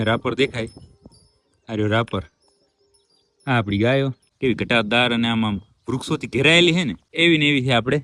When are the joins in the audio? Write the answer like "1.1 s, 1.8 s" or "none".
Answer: 4.2 s, 7.0 s